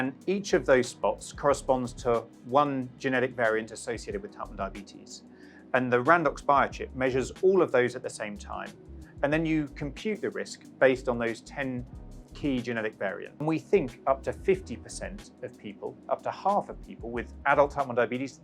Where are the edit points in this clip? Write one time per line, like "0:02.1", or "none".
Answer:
0:13.4